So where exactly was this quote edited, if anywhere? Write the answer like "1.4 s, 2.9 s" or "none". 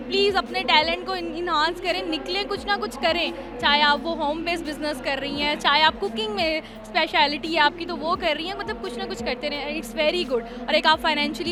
none